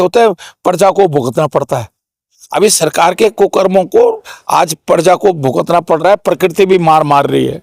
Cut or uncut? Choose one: uncut